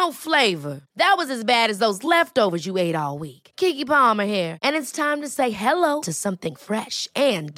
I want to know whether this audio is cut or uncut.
uncut